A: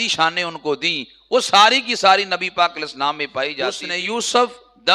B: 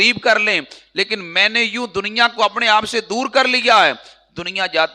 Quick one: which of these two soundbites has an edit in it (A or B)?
A